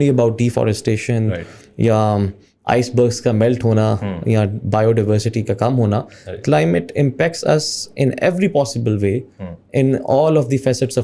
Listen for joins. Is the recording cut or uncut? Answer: uncut